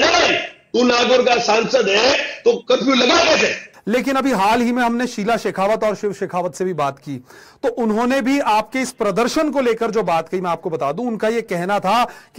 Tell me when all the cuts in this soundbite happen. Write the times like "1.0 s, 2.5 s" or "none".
3.7 s